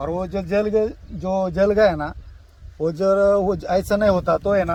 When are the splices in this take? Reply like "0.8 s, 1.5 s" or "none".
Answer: none